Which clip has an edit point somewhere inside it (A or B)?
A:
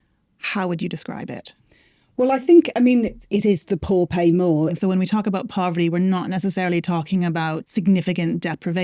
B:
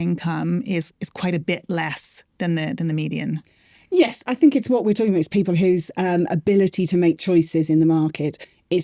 A